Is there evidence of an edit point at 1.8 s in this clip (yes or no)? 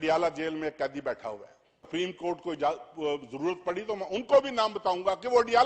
yes